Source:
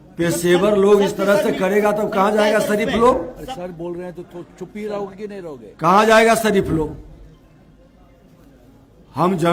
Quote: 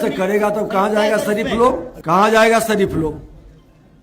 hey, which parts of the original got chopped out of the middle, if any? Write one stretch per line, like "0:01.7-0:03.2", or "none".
0:03.3-0:05.7

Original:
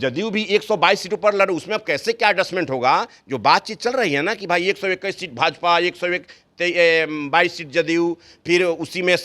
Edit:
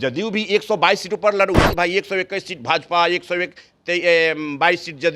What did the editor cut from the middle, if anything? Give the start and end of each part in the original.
0:01.7-0:04.4

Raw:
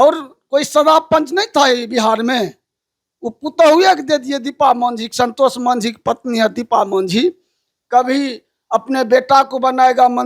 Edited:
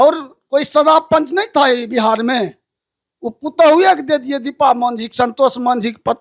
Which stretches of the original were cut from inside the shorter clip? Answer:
none

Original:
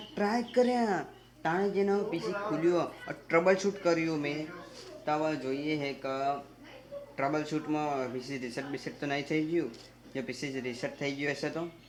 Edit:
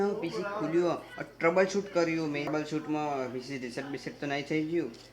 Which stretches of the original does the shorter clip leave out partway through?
0:04.4-0:07.3

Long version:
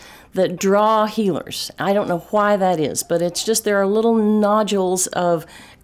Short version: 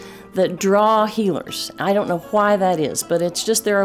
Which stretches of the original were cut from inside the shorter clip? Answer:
none

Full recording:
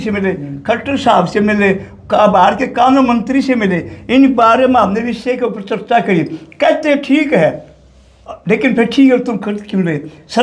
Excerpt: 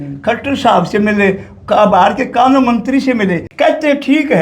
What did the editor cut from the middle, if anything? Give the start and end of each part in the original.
0:03.9-0:06.5

